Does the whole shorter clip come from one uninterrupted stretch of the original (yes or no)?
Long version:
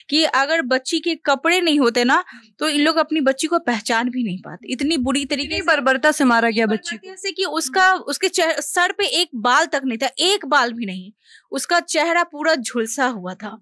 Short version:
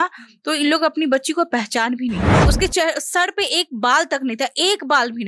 no